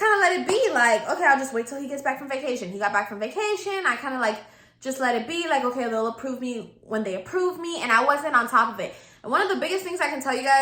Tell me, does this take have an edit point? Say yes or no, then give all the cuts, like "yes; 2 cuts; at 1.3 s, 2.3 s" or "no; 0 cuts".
no; 0 cuts